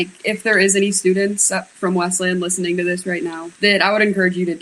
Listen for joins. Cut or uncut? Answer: cut